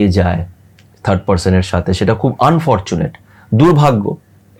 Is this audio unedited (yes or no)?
yes